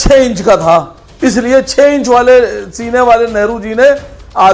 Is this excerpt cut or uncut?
cut